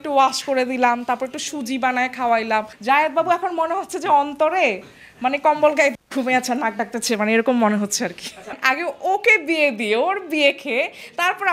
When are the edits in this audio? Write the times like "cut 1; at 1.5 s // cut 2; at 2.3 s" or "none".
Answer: cut 1; at 2.7 s // cut 2; at 8.6 s